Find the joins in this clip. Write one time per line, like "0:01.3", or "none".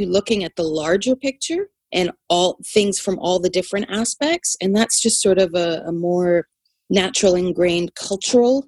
none